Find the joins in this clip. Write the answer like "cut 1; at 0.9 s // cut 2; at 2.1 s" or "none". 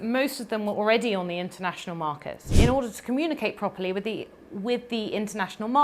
cut 1; at 2.5 s